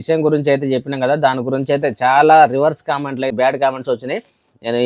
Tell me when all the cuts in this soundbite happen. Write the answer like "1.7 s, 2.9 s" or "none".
3.3 s